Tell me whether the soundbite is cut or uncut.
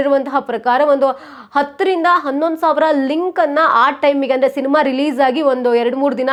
uncut